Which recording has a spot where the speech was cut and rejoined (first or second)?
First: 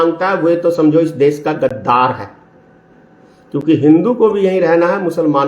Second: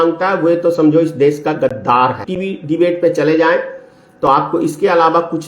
second